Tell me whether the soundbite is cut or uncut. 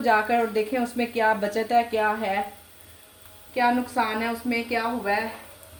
uncut